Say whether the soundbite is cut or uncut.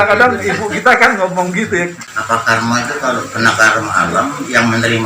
cut